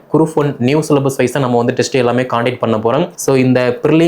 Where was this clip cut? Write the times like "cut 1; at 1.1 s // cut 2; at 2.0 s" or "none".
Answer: cut 1; at 3.1 s